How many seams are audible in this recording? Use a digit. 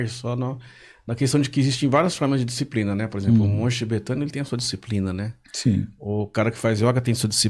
0